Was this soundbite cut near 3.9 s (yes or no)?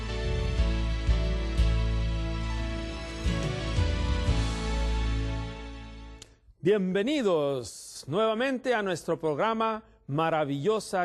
yes